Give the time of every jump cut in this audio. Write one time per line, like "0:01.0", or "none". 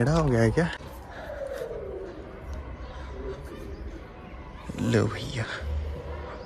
none

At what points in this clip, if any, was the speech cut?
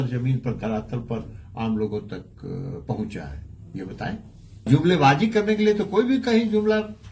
0:04.7

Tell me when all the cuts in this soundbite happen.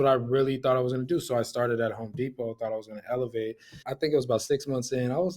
0:03.8

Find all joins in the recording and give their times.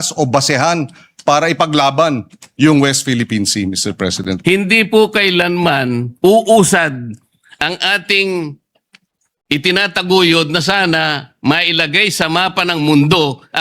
0:04.0

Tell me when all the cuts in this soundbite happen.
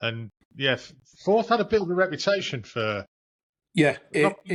none

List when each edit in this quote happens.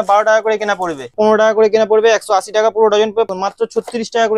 0:01.1
0:03.3

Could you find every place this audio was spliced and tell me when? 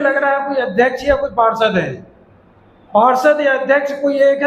none

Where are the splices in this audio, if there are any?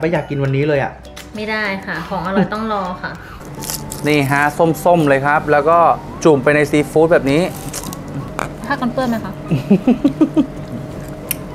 0:03.3
0:08.2

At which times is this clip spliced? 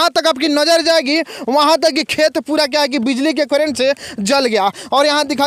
none

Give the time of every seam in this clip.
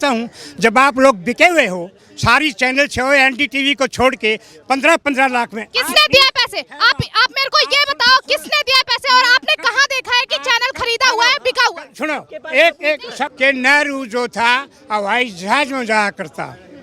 0:13.3

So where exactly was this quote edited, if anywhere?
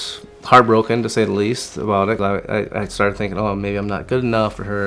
0:02.2

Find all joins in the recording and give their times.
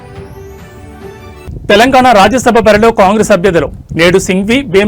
0:01.5

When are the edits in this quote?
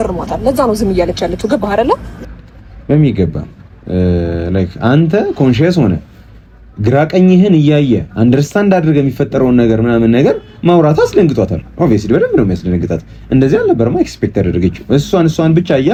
none

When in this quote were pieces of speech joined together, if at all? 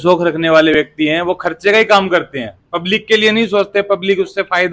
none

